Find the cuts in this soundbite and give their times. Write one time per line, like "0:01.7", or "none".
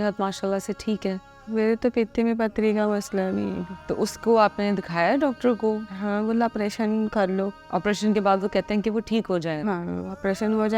0:03.7
0:07.6